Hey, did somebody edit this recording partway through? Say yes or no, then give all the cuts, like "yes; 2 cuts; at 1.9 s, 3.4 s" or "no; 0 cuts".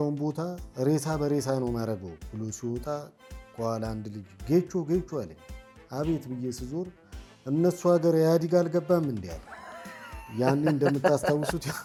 no; 0 cuts